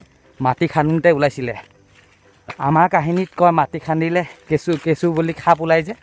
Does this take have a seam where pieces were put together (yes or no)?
no